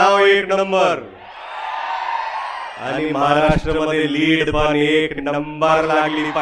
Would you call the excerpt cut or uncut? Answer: uncut